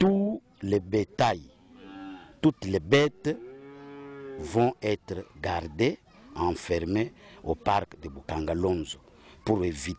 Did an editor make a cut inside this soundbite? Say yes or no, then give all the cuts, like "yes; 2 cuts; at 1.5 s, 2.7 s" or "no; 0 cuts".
no; 0 cuts